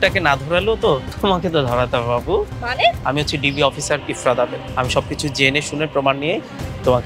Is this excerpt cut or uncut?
cut